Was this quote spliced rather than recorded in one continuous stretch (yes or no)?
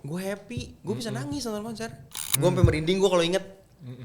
yes